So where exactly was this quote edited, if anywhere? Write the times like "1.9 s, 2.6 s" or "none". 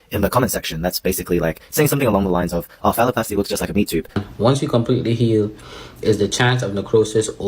4.1 s